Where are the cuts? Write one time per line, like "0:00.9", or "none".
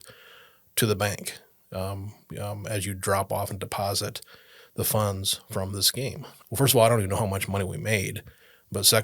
0:06.3